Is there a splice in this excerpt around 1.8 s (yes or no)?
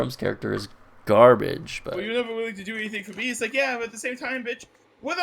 yes